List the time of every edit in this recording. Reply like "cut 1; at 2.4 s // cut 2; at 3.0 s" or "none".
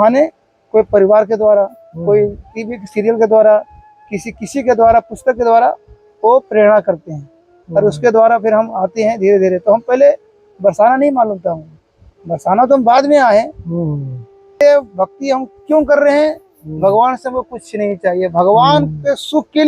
cut 1; at 14.6 s

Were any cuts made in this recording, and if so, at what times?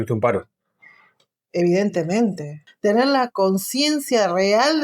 cut 1; at 2.6 s

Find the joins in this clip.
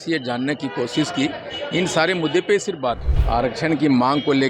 cut 1; at 3.1 s

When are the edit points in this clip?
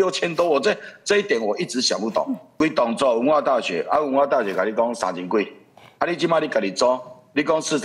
cut 1; at 2.5 s

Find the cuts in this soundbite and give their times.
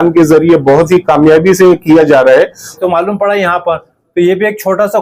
cut 1; at 2.7 s

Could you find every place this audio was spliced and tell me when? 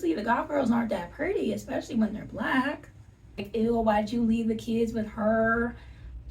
cut 1; at 3.5 s

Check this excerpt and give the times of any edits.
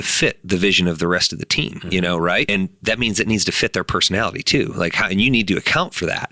cut 1; at 2.5 s

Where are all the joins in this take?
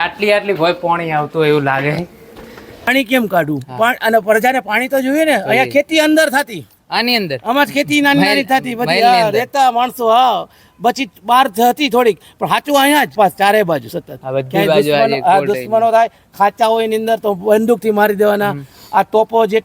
cut 1; at 2.9 s // cut 2; at 13.1 s

